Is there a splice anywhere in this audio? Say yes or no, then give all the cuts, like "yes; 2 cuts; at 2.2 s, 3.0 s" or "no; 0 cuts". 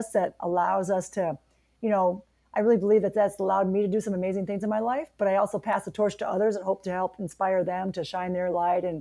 no; 0 cuts